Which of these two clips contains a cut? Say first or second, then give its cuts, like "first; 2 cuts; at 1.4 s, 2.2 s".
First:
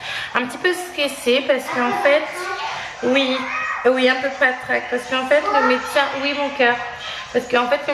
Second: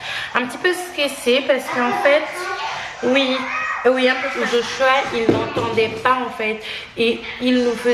second; 1 cut; at 4.3 s